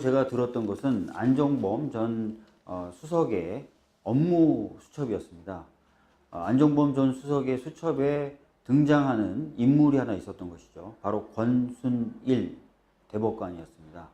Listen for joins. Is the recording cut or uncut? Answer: cut